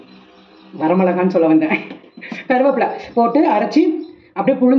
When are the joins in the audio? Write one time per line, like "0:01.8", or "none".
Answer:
none